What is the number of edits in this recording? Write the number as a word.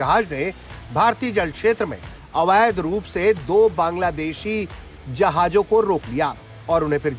zero